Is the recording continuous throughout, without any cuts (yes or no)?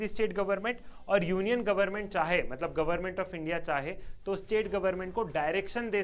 yes